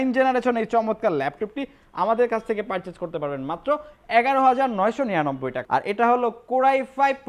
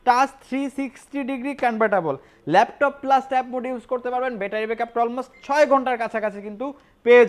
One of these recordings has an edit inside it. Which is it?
first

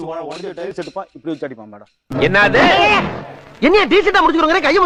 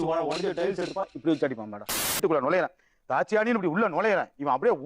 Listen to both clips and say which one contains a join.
second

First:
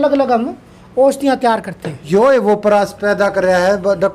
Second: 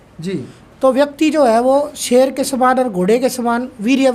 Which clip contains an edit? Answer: first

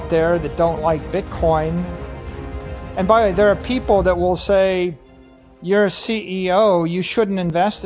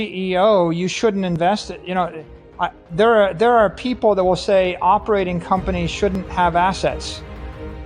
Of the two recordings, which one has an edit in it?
second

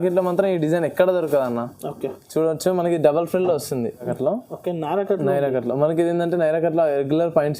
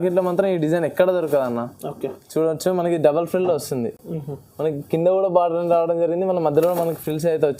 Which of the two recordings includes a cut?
first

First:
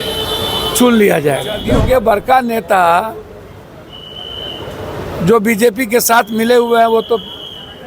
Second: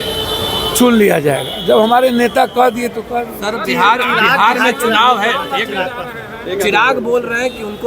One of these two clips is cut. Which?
first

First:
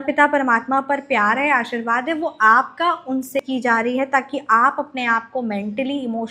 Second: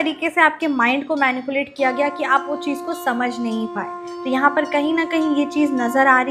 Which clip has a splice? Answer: first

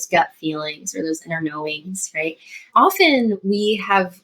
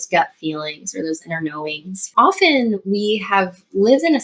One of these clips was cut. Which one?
second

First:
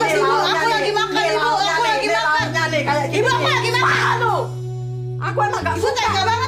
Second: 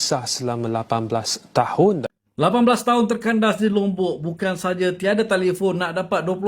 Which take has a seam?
second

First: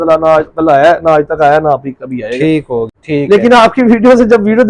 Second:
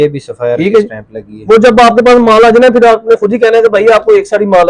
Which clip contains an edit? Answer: first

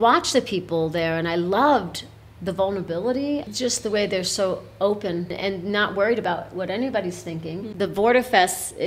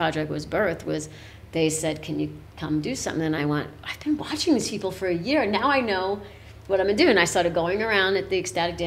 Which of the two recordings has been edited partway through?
first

